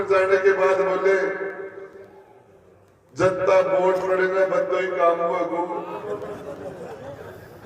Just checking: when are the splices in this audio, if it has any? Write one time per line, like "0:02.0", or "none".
0:06.0